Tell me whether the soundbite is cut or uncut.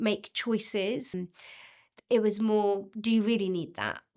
cut